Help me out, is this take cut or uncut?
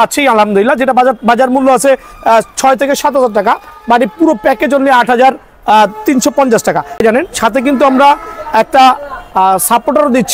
cut